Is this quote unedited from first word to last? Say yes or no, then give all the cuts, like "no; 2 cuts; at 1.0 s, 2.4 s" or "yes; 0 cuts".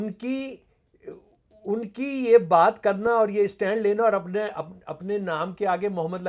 yes; 0 cuts